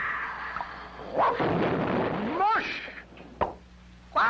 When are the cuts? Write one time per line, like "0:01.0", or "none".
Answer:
0:01.2